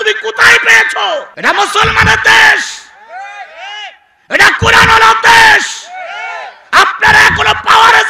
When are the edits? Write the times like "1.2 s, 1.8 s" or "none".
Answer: 1.3 s